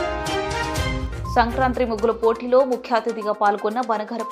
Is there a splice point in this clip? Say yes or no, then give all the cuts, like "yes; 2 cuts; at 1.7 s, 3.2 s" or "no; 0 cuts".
no; 0 cuts